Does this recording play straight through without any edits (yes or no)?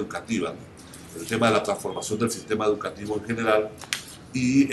no